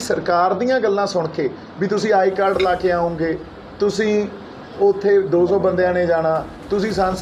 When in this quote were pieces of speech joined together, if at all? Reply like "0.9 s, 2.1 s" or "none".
none